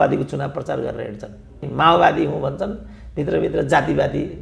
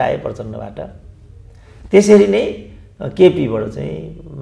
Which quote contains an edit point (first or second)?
first